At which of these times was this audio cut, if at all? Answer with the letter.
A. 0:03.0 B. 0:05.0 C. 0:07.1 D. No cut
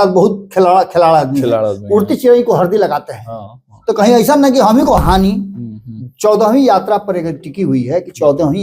B